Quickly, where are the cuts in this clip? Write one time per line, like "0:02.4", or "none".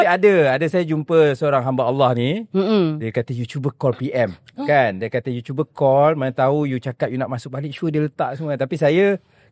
none